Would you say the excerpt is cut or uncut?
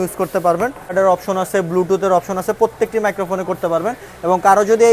cut